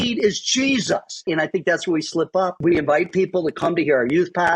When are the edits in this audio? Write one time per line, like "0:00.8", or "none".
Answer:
0:01.1
0:02.6